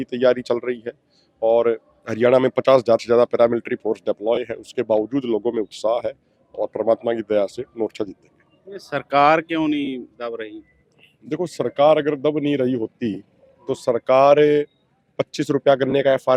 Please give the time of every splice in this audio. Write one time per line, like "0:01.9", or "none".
none